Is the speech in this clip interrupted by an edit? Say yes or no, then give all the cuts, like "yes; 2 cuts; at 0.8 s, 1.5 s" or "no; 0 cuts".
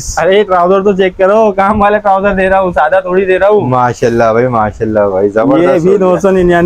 no; 0 cuts